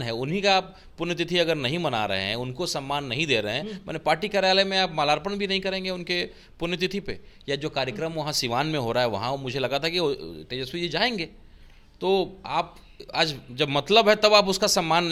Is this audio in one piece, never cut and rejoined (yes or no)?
yes